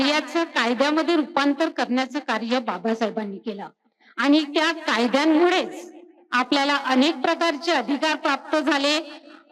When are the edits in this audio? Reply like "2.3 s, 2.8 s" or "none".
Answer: none